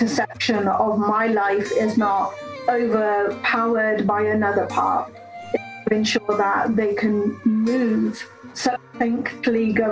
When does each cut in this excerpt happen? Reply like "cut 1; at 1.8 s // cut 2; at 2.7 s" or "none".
none